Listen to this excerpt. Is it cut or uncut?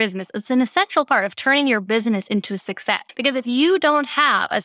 cut